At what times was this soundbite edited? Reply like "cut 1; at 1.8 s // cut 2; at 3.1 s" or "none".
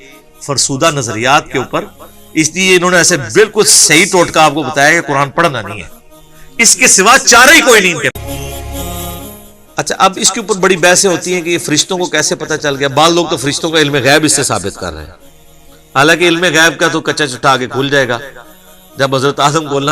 cut 1; at 8.1 s